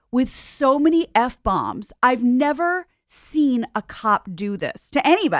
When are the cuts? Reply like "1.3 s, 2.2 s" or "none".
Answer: none